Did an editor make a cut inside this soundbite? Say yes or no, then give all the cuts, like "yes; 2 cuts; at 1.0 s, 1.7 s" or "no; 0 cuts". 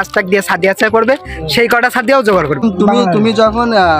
yes; 1 cut; at 2.6 s